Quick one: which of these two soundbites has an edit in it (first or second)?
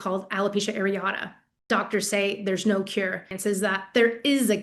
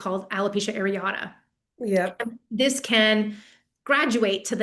first